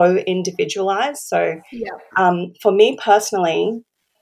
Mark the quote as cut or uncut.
uncut